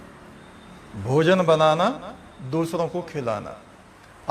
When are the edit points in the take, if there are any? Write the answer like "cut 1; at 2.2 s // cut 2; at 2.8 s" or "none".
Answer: none

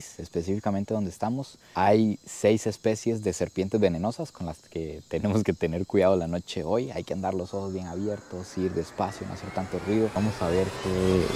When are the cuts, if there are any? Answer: none

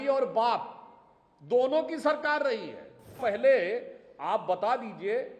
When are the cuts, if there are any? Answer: cut 1; at 3.2 s

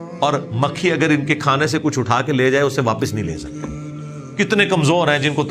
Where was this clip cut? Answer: none

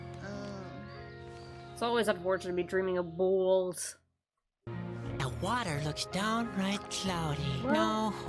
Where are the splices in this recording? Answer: cut 1; at 4.6 s

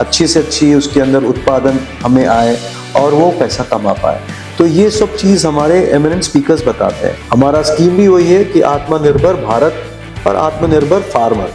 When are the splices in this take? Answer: cut 1; at 7.1 s

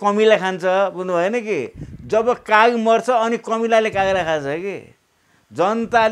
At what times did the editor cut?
none

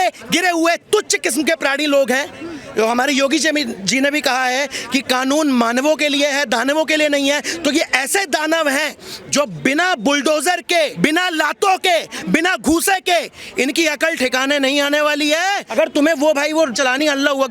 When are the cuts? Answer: cut 1; at 10.9 s // cut 2; at 15.6 s

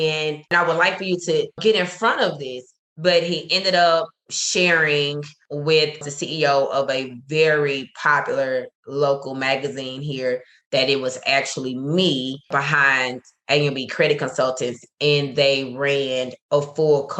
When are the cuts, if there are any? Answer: none

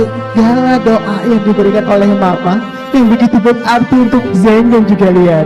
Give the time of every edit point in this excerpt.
none

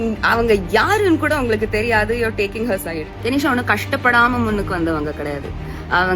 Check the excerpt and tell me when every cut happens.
cut 1; at 3.1 s

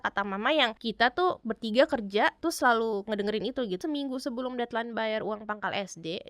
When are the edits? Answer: cut 1; at 1.3 s // cut 2; at 2.4 s // cut 3; at 3.8 s

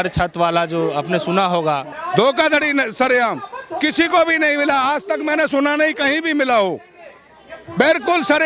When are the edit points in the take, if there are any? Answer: cut 1; at 1.9 s

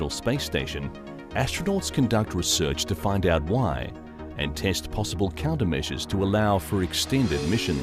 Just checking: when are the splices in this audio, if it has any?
none

